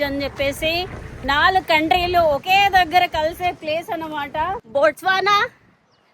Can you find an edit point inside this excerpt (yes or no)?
yes